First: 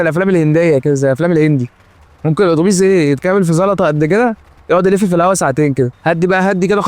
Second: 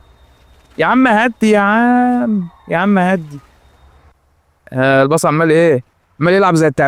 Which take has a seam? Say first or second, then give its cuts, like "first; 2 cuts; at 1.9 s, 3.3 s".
first; 1 cut; at 6.0 s